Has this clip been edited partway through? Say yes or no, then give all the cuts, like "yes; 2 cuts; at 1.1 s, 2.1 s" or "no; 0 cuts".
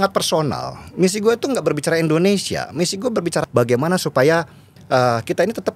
yes; 1 cut; at 3.5 s